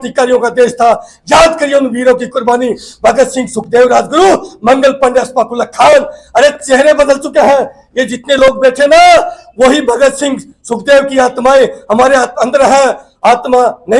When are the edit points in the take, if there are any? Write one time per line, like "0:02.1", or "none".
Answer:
none

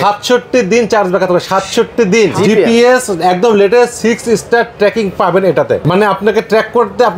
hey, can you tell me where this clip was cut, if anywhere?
0:02.3
0:05.8

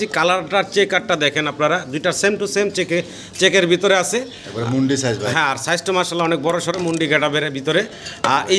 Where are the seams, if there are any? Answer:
none

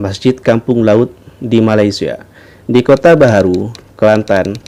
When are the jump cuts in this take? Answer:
none

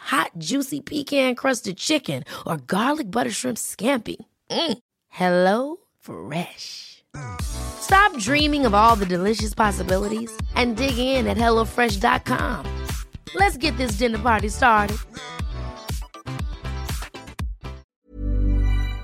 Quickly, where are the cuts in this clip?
0:17.8

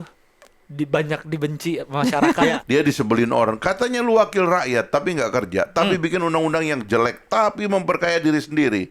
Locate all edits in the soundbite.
0:02.6

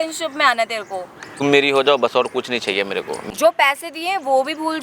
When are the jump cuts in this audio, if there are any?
0:01.4
0:03.2

